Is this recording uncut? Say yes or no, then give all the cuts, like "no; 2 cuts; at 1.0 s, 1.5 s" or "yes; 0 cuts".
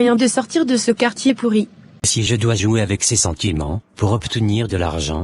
no; 1 cut; at 2.2 s